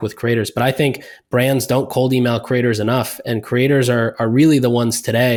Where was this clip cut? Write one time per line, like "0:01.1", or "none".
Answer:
none